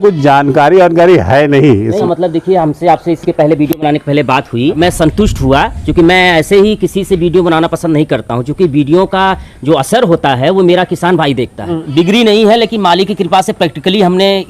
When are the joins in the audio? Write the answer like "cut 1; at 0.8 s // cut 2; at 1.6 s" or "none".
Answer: cut 1; at 2.0 s // cut 2; at 4.8 s // cut 3; at 11.8 s